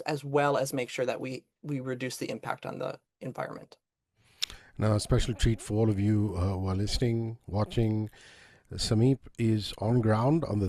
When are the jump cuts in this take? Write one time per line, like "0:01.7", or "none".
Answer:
none